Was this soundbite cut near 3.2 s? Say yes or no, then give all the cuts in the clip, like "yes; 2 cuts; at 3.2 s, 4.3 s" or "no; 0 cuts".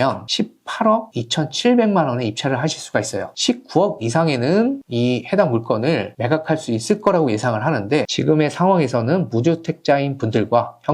yes; 2 cuts; at 3.2 s, 8.1 s